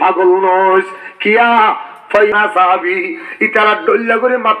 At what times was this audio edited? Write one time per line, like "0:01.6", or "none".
0:02.3